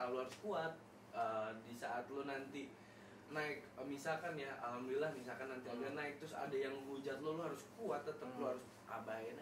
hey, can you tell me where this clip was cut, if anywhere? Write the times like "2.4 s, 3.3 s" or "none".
none